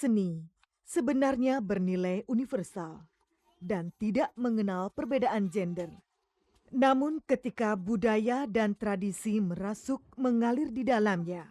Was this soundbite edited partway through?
no; 0 cuts

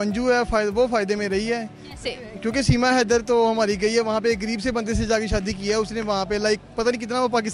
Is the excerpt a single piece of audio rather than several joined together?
yes; 0 cuts

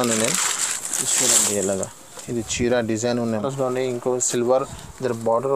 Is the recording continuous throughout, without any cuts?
no; 1 cut; at 3.4 s

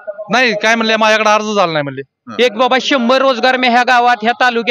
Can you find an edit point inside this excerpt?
yes; 1 cut; at 2.3 s

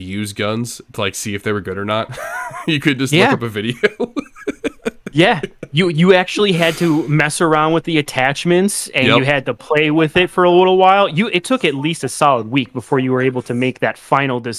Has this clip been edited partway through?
no; 0 cuts

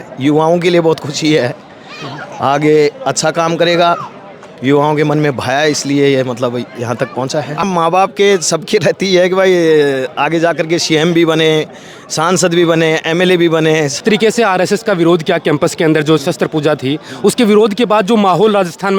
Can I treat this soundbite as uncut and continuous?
no; 2 cuts; at 7.6 s, 14.0 s

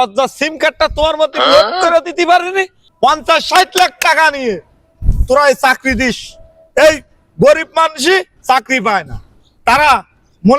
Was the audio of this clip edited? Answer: no; 0 cuts

